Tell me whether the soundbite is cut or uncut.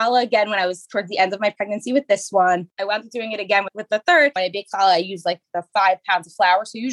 cut